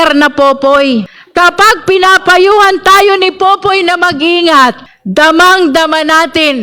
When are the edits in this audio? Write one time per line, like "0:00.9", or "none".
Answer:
0:01.2
0:04.9